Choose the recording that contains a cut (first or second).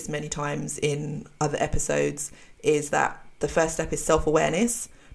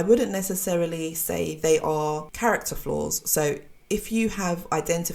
second